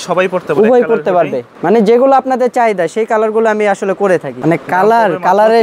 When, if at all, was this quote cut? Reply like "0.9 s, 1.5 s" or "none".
1.5 s, 4.3 s